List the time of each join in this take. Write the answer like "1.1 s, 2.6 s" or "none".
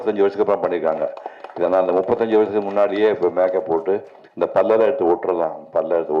none